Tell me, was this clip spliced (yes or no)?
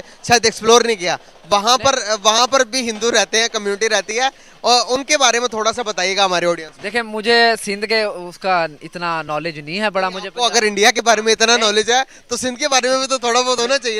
no